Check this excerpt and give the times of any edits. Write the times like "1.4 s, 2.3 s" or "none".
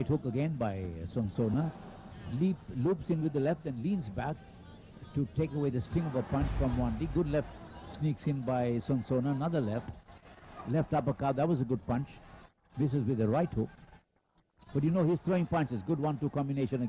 5.3 s